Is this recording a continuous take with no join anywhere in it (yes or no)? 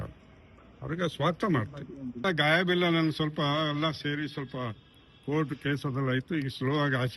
no